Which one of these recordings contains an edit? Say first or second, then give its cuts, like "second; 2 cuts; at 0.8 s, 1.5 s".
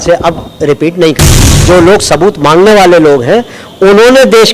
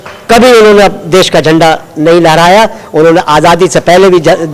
first; 1 cut; at 1.5 s